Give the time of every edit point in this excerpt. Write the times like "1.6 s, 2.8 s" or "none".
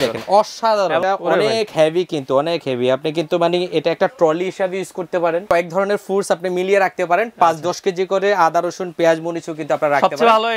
1.0 s, 5.4 s